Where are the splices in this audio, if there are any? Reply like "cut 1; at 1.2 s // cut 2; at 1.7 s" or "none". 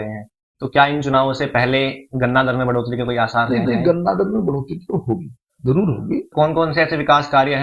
cut 1; at 6.3 s